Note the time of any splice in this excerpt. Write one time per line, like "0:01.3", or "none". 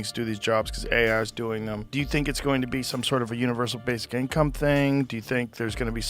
0:01.8